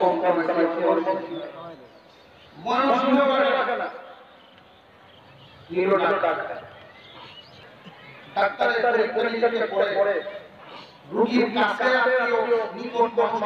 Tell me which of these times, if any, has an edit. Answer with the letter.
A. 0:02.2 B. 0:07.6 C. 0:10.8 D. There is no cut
B